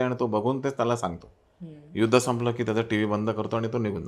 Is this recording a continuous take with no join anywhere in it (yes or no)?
yes